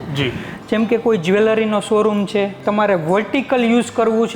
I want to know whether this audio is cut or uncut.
cut